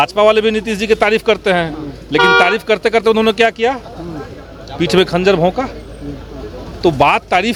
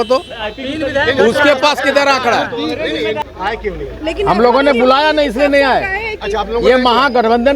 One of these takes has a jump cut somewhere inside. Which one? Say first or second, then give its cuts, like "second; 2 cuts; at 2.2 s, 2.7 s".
second; 1 cut; at 3.2 s